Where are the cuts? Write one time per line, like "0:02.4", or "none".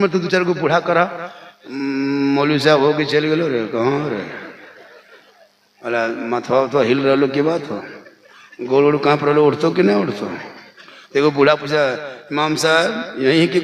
none